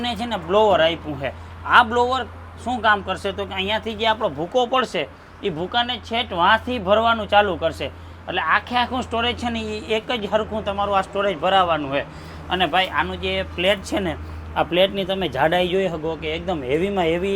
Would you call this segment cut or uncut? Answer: uncut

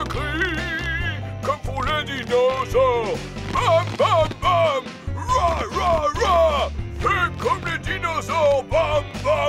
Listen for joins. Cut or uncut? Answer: uncut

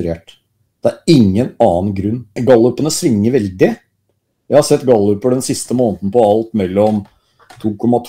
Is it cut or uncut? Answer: cut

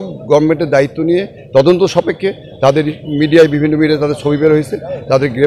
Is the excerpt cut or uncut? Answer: uncut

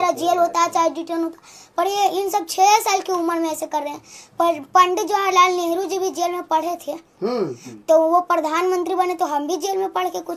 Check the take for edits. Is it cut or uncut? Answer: uncut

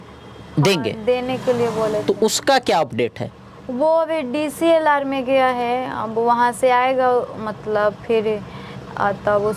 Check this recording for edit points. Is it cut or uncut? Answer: uncut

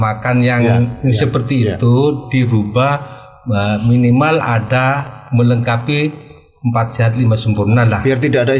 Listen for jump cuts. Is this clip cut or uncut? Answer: uncut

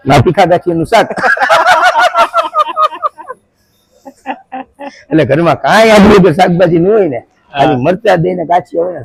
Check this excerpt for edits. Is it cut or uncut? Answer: uncut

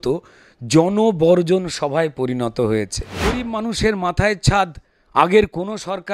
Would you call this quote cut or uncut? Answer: cut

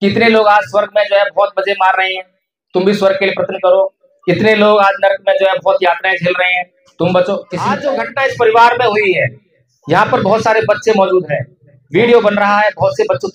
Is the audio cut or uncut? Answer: cut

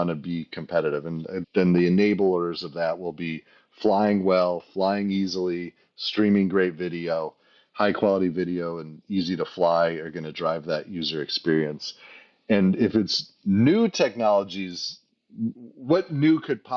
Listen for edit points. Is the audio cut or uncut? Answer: cut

